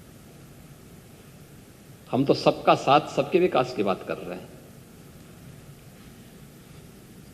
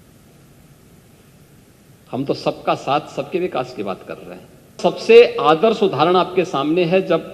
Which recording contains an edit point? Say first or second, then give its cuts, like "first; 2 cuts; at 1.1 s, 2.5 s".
second; 1 cut; at 4.8 s